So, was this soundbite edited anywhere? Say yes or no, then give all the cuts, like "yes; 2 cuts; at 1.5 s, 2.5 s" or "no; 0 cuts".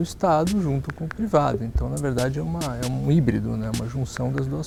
no; 0 cuts